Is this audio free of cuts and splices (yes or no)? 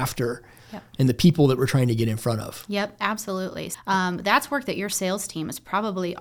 no